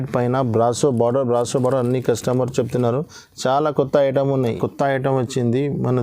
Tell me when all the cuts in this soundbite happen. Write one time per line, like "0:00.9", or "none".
0:04.6